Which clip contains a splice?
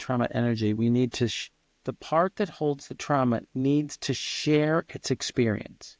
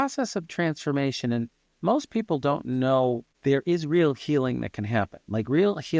second; 1 cut; at 3.3 s

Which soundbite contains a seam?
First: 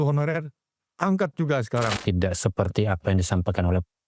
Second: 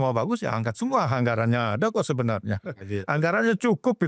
first; 1 cut; at 2.0 s

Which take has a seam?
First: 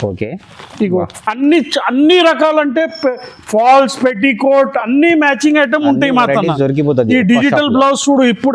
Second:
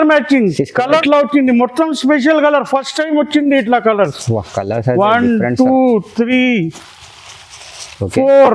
second; 1 cut; at 1.0 s

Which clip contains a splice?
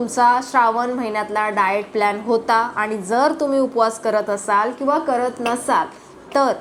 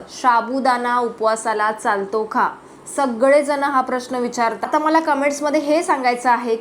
second; 1 cut; at 4.7 s

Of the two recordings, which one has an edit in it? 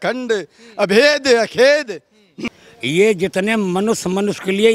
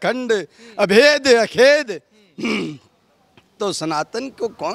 first; 1 cut; at 2.4 s

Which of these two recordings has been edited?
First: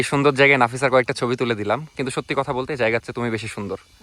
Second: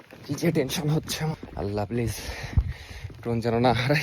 second; 1 cut; at 1.4 s

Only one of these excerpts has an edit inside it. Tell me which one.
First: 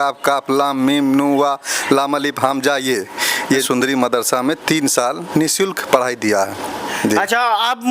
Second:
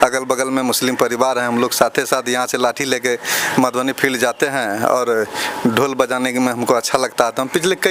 first; 2 cuts; at 3.6 s, 6.9 s

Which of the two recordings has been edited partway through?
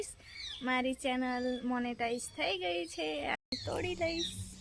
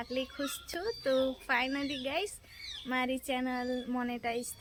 first; 1 cut; at 3.5 s

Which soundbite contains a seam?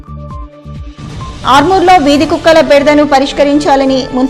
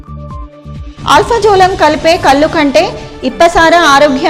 first; 1 cut; at 0.9 s

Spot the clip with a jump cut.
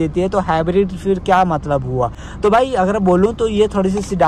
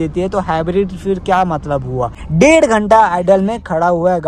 second; 1 cut; at 2.2 s

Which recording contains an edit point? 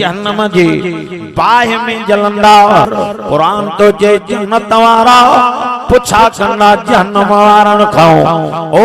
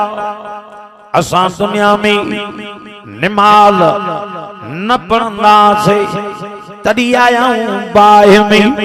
first; 1 cut; at 2.9 s

